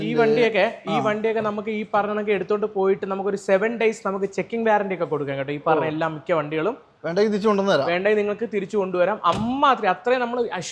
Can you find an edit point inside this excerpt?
no; 0 cuts

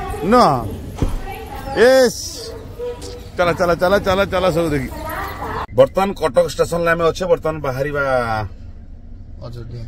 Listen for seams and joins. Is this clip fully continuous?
no; 1 cut; at 5.6 s

